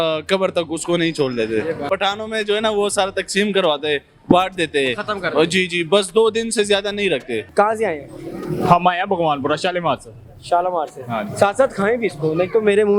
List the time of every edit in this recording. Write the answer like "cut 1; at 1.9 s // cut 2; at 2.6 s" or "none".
cut 1; at 1.9 s // cut 2; at 7.5 s